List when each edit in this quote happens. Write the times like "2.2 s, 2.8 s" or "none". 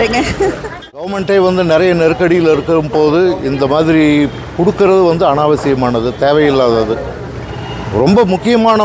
1.0 s